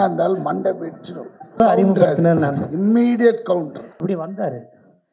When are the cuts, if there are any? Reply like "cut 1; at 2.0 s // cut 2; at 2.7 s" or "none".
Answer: cut 1; at 1.6 s // cut 2; at 3.8 s